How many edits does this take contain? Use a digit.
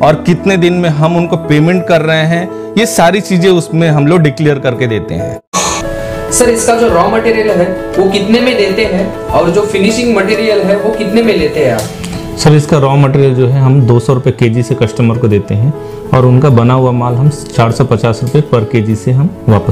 1